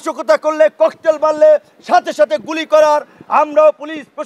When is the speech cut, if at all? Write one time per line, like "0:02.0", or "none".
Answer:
none